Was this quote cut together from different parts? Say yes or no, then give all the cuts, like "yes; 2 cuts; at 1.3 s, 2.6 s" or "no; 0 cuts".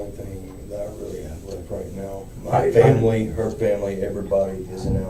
no; 0 cuts